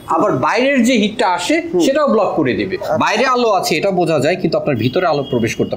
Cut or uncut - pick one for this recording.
cut